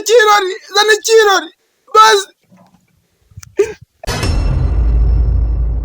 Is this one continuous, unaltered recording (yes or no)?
no